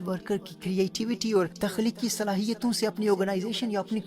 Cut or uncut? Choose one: cut